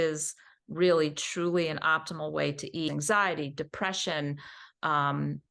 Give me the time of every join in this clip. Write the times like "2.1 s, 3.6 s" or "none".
2.9 s